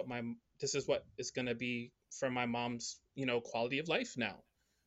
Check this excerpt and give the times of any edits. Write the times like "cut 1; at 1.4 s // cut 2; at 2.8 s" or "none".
none